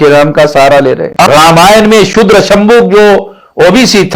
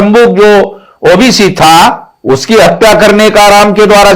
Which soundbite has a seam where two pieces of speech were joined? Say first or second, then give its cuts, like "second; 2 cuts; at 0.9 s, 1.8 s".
first; 1 cut; at 1.1 s